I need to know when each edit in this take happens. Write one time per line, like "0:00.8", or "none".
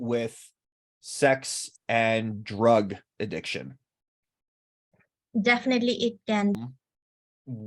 0:06.5